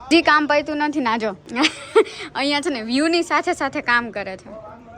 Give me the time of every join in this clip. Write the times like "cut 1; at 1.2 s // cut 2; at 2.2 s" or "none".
cut 1; at 1.4 s

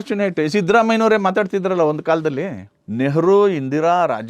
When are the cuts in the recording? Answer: cut 1; at 2.7 s

